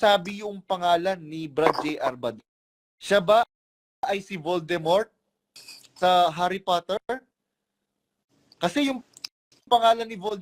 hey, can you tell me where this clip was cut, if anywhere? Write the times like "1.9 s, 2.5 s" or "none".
none